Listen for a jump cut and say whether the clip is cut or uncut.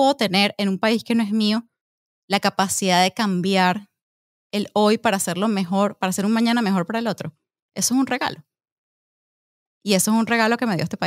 uncut